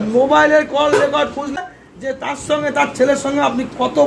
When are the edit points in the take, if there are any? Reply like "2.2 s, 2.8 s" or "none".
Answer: 1.6 s